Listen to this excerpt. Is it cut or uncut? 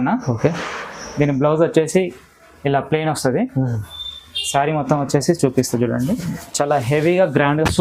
uncut